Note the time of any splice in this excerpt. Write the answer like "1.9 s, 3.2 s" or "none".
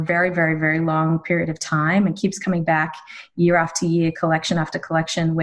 none